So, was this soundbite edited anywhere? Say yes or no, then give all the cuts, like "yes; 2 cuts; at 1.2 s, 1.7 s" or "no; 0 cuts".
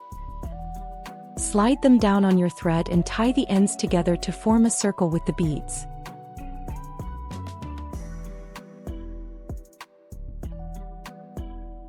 yes; 4 cuts; at 1.5 s, 5.6 s, 7.2 s, 9.5 s